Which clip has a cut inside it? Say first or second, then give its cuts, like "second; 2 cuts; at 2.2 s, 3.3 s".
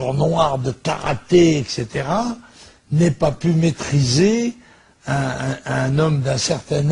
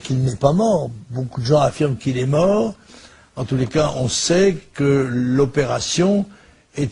first; 1 cut; at 2.2 s